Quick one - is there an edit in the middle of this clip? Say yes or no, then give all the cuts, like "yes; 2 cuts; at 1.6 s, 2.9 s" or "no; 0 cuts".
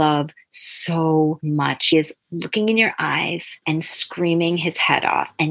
yes; 2 cuts; at 1.9 s, 3.6 s